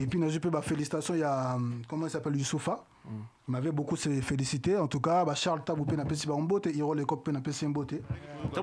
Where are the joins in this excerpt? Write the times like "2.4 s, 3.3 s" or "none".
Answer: none